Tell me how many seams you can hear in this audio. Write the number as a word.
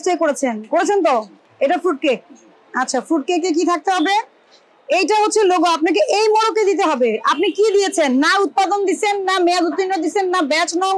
one